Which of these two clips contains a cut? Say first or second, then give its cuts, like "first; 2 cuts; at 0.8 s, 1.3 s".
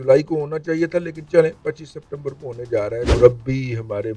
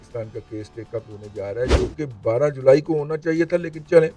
first; 1 cut; at 3.1 s